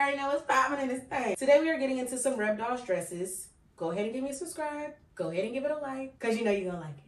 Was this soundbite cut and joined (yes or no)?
yes